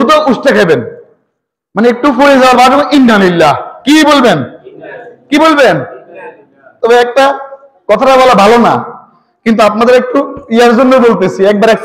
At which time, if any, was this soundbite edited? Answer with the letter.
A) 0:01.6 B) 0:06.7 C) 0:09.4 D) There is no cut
D